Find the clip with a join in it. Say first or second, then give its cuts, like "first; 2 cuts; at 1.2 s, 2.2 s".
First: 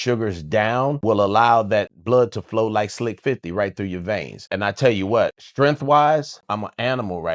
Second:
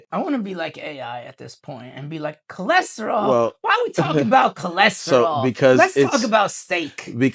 first; 5 cuts; at 1.0 s, 2.0 s, 4.4 s, 5.4 s, 6.4 s